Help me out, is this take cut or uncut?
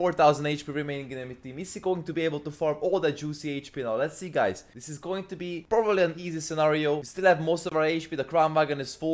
uncut